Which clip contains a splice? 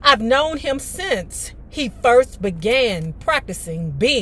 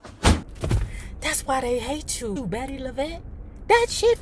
second; 1 cut; at 2.4 s

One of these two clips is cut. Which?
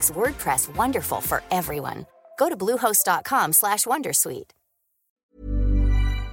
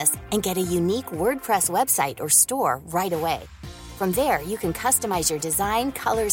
first; 1 cut; at 5.2 s

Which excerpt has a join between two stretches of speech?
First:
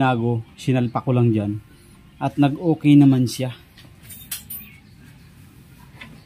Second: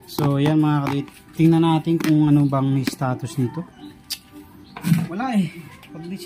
first; 1 cut; at 4.1 s

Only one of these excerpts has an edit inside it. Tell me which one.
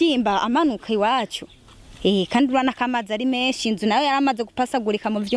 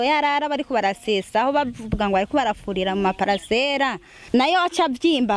second; 1 cut; at 4.1 s

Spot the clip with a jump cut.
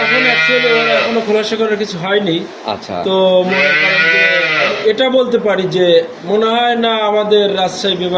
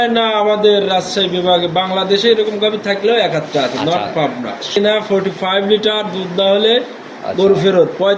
second; 1 cut; at 4.8 s

